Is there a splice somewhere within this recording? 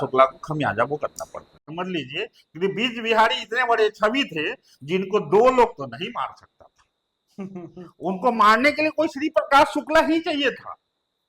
yes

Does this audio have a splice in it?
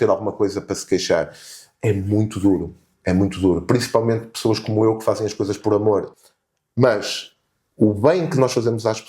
yes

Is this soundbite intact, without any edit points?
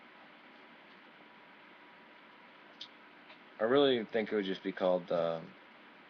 yes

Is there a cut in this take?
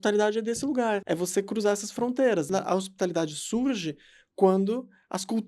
yes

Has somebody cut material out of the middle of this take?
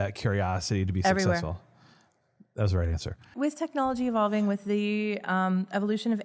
yes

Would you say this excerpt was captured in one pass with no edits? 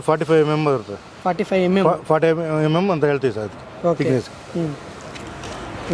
yes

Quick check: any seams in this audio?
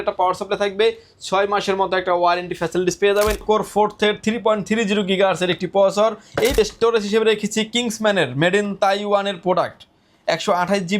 yes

